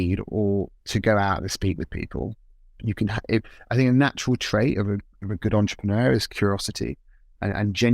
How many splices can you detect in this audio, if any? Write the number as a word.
one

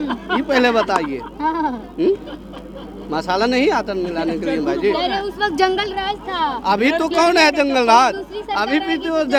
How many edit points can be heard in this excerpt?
zero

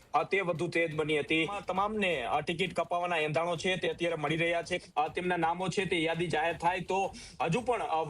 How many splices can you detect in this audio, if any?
two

